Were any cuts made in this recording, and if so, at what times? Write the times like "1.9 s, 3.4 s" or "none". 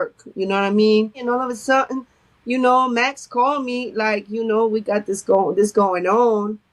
1.2 s